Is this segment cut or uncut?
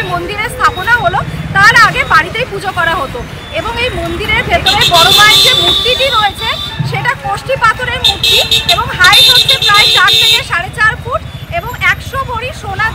uncut